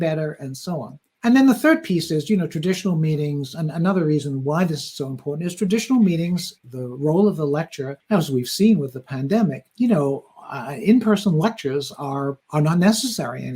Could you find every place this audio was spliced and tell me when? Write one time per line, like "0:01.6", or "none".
none